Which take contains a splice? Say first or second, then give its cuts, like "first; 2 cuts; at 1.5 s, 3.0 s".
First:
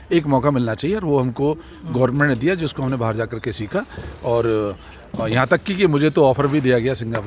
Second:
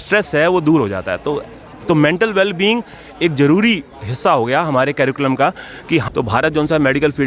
second; 1 cut; at 6.0 s